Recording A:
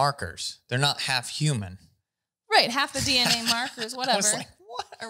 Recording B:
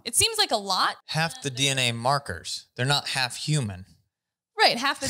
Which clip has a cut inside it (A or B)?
B